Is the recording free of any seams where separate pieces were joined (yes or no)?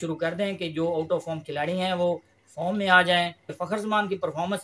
no